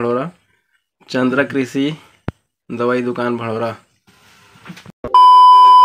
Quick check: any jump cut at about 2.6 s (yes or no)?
no